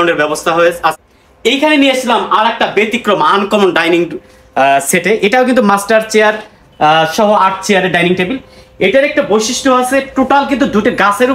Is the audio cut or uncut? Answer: cut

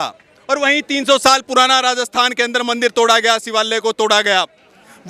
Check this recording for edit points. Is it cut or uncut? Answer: uncut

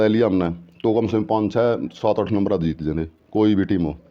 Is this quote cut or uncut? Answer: uncut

